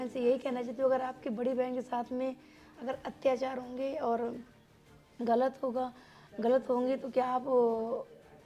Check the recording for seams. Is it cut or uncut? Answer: uncut